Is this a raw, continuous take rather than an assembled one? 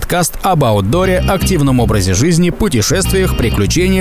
yes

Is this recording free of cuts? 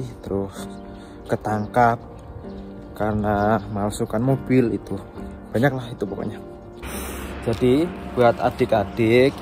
no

